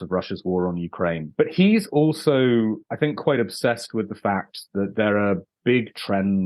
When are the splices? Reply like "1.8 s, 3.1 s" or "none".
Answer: 1.2 s, 2.9 s